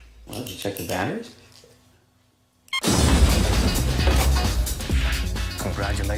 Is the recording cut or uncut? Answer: uncut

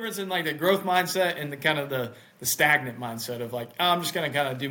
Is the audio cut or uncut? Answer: uncut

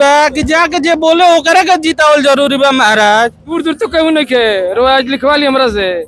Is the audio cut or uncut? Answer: cut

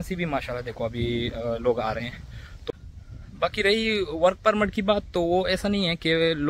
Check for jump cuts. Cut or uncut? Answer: cut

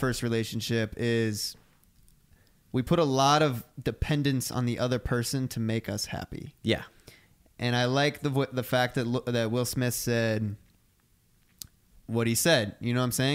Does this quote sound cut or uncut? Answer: uncut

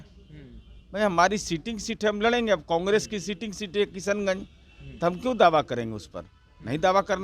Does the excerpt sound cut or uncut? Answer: uncut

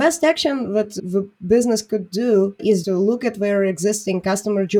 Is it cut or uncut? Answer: cut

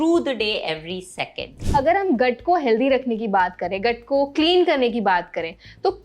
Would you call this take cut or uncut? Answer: cut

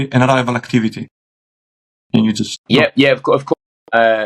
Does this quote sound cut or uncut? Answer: cut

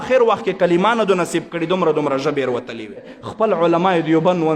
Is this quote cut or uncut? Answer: cut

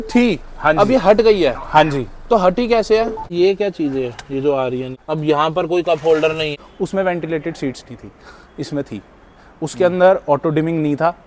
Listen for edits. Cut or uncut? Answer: cut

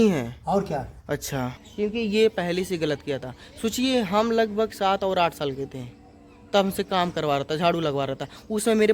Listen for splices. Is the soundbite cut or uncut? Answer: cut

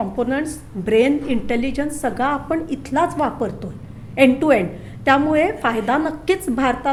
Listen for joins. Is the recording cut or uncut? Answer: uncut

